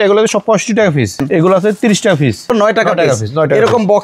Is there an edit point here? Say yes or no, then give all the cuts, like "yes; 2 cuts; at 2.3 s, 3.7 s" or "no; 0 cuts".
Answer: yes; 2 cuts; at 1.2 s, 2.6 s